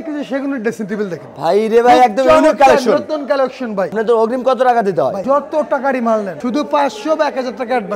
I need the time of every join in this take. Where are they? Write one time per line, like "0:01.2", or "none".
0:04.0
0:05.2
0:06.3